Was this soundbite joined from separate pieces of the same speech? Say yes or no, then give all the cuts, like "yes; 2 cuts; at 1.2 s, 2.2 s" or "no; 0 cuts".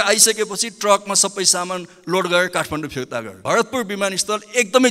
yes; 1 cut; at 3.4 s